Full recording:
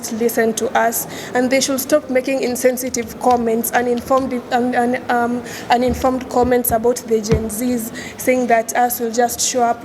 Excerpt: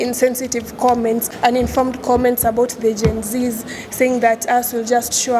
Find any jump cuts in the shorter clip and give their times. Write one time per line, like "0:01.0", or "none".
0:01.2

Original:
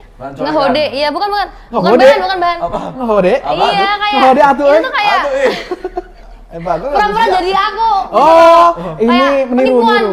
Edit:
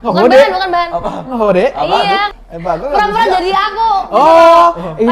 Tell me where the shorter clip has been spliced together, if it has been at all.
0:02.3

